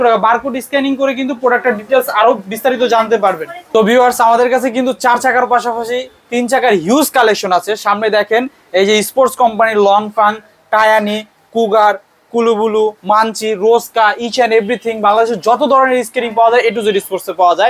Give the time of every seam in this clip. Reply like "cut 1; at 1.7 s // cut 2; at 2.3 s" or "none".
none